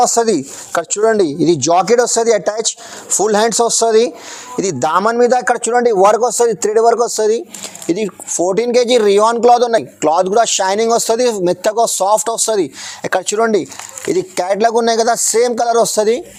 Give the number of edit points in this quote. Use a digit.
0